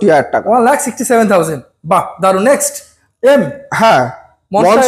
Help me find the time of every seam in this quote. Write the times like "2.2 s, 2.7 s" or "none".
none